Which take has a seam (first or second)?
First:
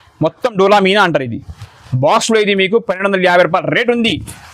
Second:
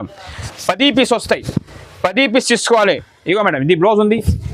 second